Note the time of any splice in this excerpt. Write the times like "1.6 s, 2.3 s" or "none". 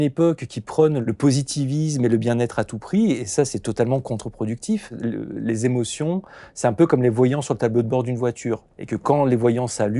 1.0 s, 4.9 s